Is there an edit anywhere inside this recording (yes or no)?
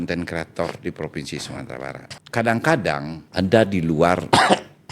yes